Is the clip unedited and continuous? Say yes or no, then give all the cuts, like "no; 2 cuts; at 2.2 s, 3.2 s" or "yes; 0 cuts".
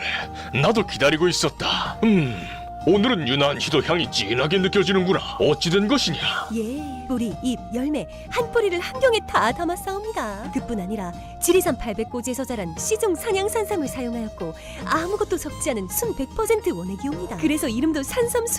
yes; 0 cuts